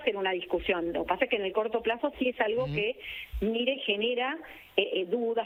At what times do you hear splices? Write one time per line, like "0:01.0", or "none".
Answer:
none